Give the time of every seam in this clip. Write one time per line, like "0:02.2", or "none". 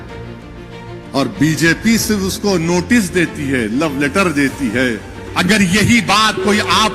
0:05.2